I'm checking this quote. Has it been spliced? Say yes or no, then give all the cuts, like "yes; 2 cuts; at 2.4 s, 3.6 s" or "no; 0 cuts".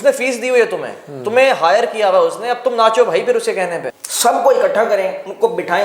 yes; 1 cut; at 3.8 s